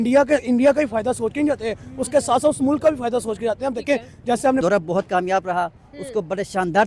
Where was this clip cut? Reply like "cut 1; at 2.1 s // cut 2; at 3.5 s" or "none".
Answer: cut 1; at 4.6 s